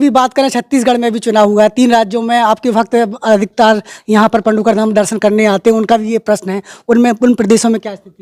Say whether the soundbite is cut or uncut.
uncut